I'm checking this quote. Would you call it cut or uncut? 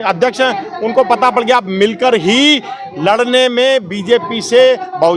uncut